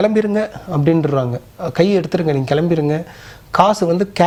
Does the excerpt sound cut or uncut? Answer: uncut